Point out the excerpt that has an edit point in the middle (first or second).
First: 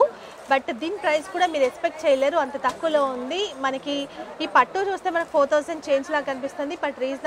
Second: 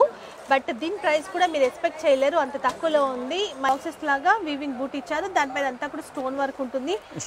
second